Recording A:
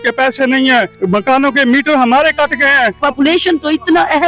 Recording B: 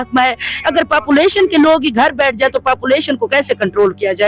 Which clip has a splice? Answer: A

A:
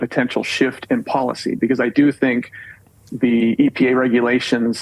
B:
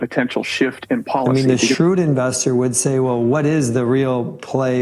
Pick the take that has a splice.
B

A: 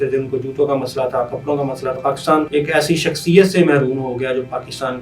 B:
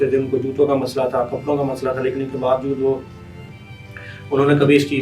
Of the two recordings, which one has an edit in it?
A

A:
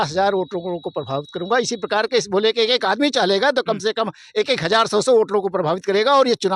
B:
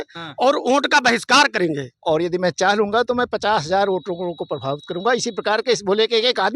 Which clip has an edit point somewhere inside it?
B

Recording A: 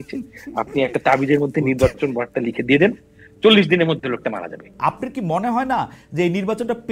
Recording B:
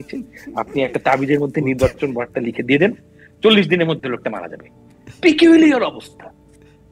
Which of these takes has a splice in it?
A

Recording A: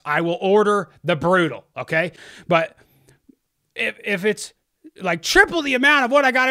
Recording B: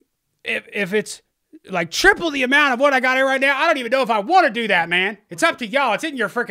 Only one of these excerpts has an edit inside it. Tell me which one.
A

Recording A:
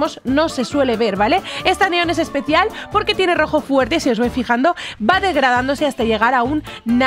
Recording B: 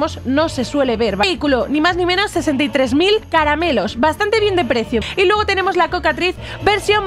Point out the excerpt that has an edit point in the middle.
B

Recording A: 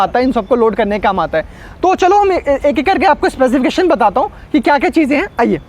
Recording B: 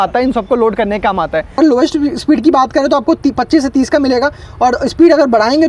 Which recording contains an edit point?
B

